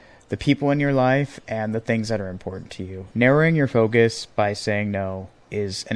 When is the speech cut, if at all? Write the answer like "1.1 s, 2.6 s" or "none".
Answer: 3.1 s